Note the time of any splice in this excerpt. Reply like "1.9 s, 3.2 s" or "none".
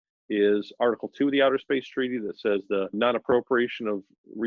3.0 s